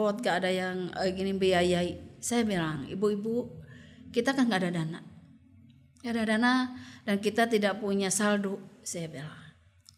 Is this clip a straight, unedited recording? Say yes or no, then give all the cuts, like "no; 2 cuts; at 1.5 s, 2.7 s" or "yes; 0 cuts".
yes; 0 cuts